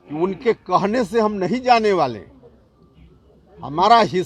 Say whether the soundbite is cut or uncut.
uncut